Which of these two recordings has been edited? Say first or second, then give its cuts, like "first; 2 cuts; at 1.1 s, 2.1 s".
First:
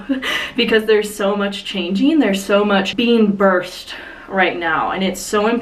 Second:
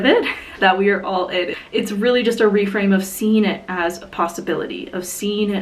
second; 1 cut; at 1.6 s